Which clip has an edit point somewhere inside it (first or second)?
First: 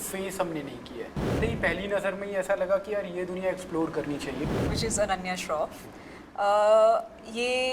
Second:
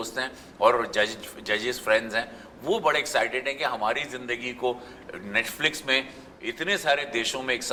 first